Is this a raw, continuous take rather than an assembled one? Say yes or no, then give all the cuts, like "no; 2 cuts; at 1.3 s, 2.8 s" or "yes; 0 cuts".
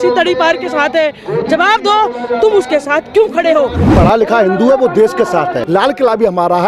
no; 2 cuts; at 3.9 s, 5.6 s